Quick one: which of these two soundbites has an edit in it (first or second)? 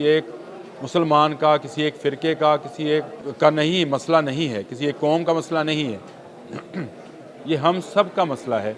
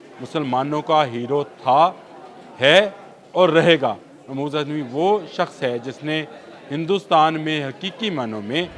first